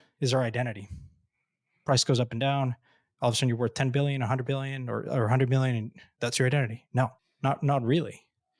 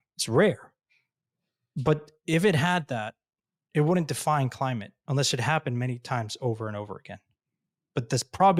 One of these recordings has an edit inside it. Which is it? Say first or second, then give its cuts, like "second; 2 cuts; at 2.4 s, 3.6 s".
first; 1 cut; at 7.2 s